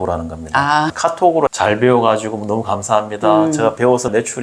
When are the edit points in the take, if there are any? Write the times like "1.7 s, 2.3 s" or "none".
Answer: 1.1 s